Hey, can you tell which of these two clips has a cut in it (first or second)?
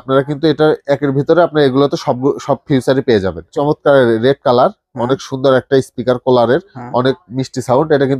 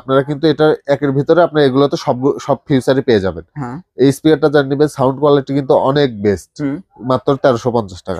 first